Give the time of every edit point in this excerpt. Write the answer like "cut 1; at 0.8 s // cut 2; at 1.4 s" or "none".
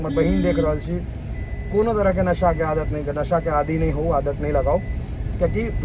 none